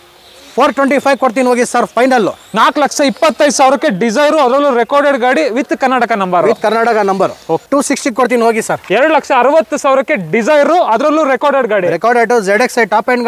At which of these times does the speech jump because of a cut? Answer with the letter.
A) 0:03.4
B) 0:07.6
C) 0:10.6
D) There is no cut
B